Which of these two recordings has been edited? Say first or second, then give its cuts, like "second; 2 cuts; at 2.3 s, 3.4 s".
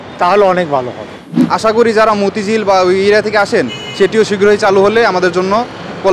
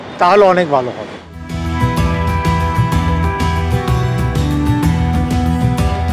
first; 1 cut; at 1.3 s